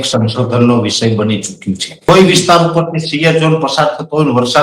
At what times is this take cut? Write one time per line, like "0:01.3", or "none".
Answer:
0:02.0